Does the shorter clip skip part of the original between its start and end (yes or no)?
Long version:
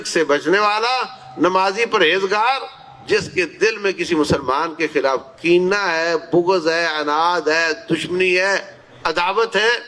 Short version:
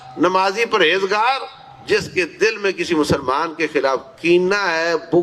no